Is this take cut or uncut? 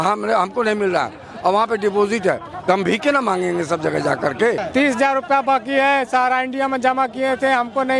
cut